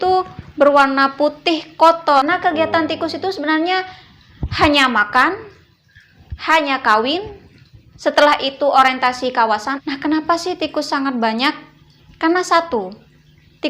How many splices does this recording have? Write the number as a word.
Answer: two